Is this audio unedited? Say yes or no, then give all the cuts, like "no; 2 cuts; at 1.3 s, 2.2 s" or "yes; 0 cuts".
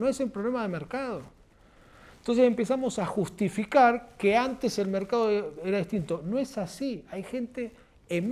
yes; 0 cuts